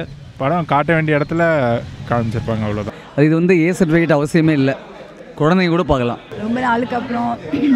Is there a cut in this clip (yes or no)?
yes